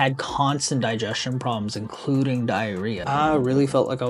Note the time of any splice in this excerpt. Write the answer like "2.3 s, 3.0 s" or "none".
3.0 s